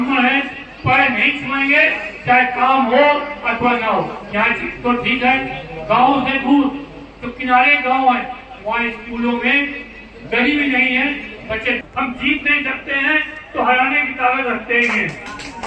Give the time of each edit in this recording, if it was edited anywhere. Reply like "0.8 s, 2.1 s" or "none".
4.2 s, 11.8 s

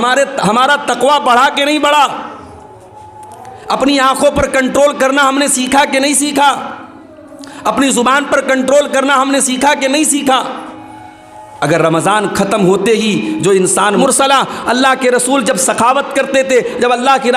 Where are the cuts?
14.0 s

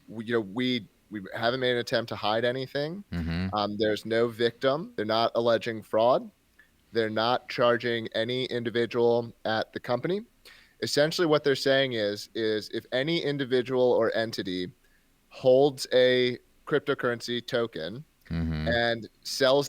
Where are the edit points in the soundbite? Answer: 4.9 s

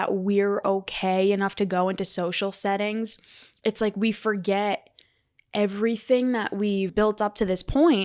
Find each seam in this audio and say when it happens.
6.9 s

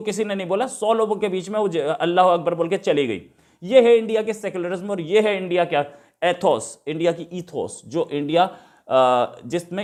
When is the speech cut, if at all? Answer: none

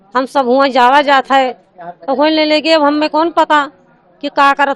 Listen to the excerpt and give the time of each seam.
none

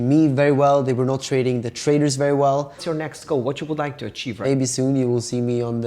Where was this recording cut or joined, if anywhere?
2.8 s, 4.4 s

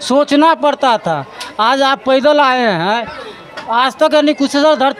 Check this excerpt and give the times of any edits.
none

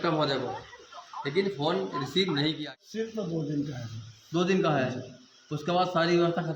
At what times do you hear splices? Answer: 2.6 s

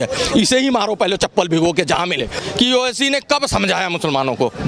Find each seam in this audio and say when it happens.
2.4 s

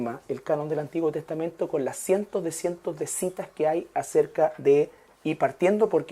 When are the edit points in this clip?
3.9 s

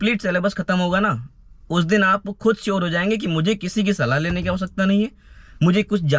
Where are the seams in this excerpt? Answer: none

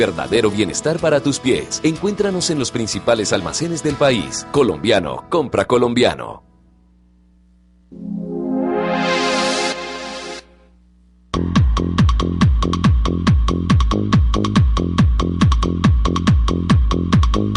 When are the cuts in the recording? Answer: 7.3 s

